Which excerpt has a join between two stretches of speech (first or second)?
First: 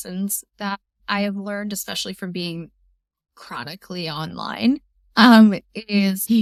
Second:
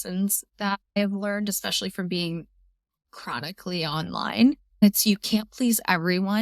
second